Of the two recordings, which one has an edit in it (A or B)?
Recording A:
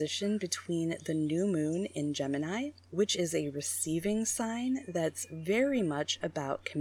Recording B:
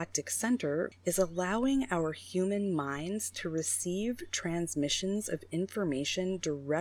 B